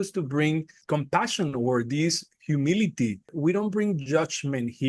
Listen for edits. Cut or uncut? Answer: cut